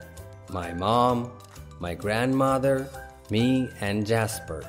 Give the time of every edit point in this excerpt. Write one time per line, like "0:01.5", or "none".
none